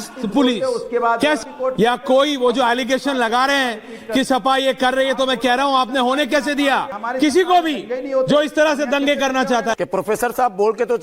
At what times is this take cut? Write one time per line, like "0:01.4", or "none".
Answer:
0:01.4
0:07.0
0:09.7